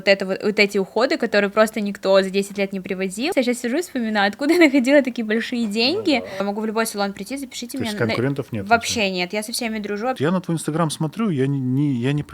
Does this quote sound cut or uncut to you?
cut